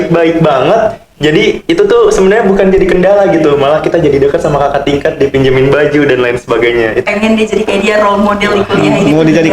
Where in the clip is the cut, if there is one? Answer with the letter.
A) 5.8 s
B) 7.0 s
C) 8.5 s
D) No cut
B